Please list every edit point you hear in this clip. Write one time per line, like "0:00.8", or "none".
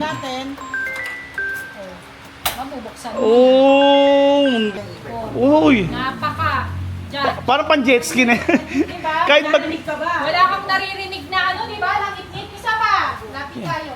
0:04.7